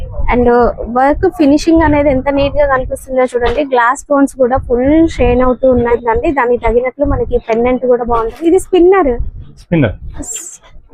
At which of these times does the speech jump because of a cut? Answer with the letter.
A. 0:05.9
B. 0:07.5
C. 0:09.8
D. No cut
A